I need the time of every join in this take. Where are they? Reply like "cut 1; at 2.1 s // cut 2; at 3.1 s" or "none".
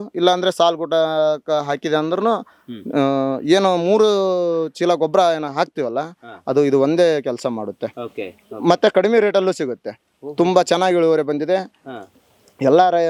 none